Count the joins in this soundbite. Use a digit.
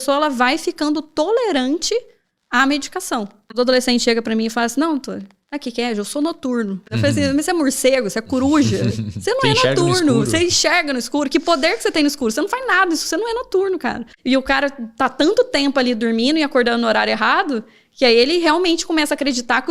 3